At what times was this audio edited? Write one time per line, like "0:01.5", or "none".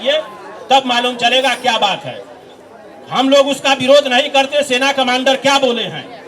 none